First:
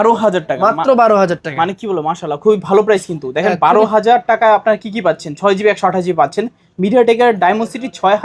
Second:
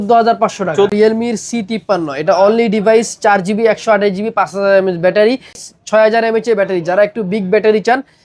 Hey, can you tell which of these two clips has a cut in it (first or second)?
second